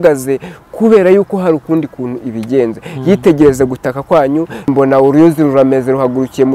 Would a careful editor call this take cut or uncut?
cut